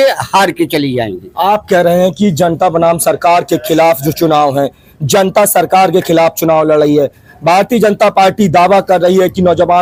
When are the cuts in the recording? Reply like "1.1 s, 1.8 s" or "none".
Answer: none